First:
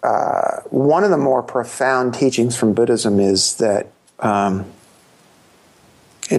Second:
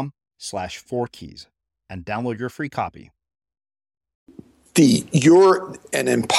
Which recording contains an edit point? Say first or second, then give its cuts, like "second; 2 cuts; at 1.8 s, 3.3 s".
second; 1 cut; at 4.6 s